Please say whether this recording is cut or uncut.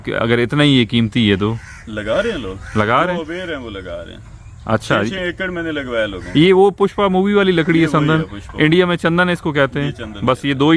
uncut